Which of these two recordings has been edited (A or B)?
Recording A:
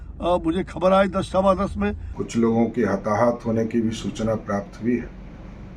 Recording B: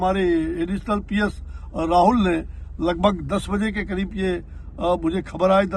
A